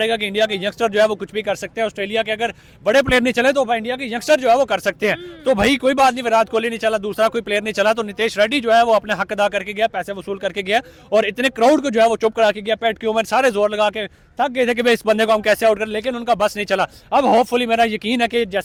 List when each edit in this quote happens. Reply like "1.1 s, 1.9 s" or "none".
none